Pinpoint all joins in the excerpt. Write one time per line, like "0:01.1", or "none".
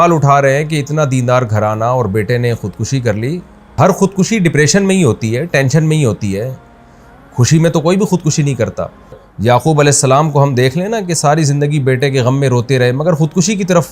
0:03.8
0:09.3

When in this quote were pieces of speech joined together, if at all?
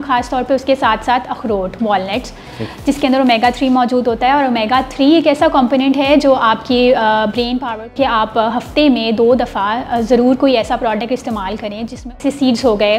0:07.9
0:12.1

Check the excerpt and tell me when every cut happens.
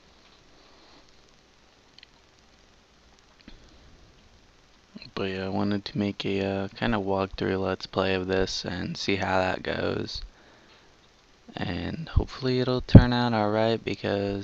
0:09.7

